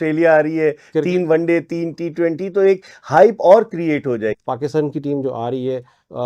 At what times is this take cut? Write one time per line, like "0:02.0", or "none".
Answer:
0:04.3